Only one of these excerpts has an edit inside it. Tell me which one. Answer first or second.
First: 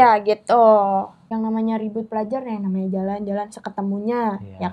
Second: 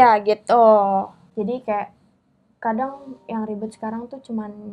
first